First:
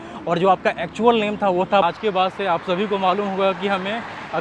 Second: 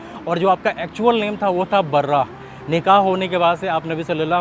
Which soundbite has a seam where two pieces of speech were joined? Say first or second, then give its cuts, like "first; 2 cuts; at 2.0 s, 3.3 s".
first; 1 cut; at 1.8 s